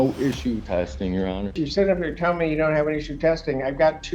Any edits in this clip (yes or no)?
yes